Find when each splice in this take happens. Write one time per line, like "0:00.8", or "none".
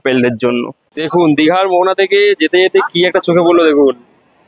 0:01.0

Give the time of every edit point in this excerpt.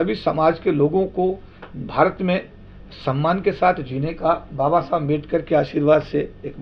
none

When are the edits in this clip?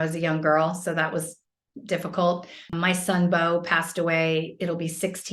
0:02.7

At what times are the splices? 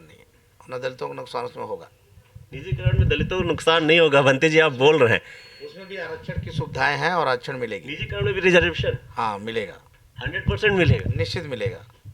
none

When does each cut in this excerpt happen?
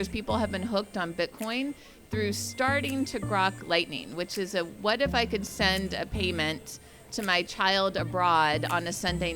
none

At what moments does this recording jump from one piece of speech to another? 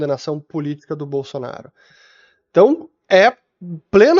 none

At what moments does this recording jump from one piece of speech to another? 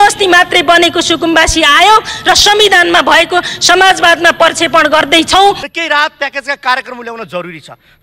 0:05.7

